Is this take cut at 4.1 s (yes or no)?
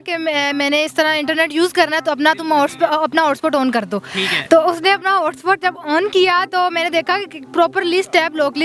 no